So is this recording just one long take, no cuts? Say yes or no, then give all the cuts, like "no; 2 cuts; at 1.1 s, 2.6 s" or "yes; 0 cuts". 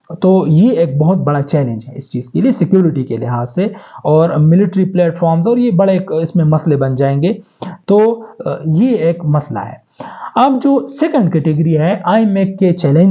yes; 0 cuts